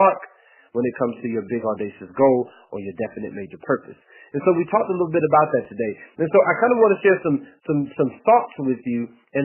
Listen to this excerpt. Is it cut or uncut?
cut